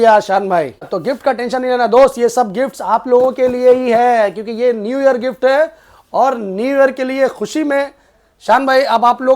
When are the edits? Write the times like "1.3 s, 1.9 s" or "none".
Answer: 0.9 s